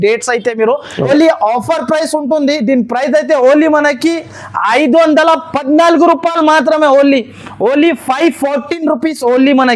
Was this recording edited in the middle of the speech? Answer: yes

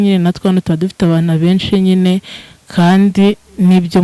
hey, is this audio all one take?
yes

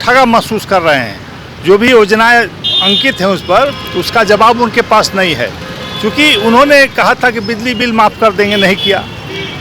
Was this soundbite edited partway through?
no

